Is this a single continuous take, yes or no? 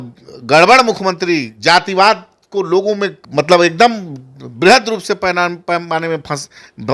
yes